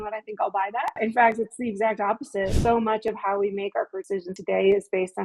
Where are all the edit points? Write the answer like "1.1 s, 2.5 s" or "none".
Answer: 1.0 s, 2.5 s, 4.2 s